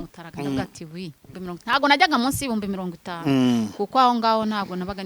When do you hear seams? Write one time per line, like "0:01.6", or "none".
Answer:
0:01.3